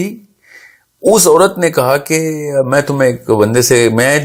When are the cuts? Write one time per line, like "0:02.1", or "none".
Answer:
none